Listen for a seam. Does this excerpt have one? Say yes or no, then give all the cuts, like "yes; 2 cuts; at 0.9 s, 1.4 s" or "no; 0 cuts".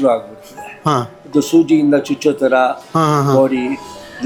no; 0 cuts